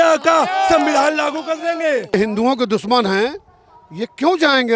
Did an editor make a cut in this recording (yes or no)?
yes